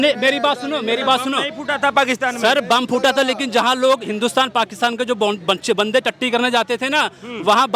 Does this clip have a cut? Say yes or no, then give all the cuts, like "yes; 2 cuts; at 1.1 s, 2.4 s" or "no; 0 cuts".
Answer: no; 0 cuts